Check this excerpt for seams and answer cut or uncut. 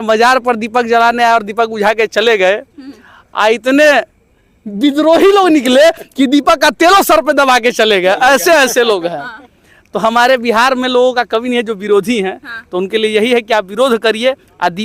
uncut